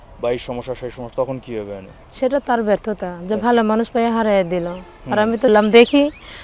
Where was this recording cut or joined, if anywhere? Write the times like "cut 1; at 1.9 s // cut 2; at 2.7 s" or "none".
cut 1; at 5.5 s